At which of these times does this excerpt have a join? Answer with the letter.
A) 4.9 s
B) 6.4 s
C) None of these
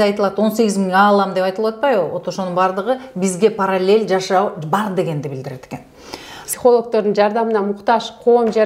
B